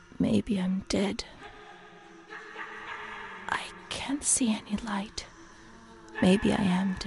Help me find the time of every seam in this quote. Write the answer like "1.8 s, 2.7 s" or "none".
none